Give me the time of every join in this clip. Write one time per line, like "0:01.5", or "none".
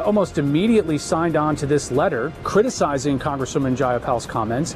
0:02.4